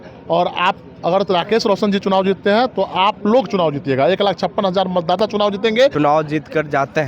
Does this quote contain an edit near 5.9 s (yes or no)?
yes